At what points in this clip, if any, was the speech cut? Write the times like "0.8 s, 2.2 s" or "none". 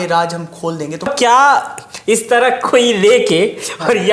1.1 s